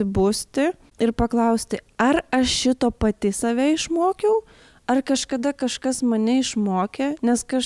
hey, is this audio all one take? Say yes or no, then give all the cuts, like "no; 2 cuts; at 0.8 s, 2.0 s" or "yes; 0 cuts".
yes; 0 cuts